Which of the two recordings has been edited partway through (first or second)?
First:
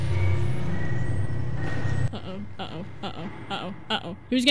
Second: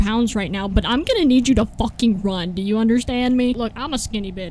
second